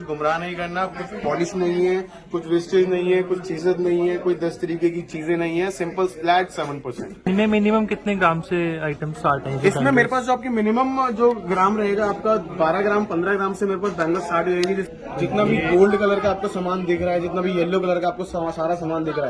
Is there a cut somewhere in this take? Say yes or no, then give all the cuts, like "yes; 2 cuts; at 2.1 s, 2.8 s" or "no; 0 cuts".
yes; 2 cuts; at 7.3 s, 14.9 s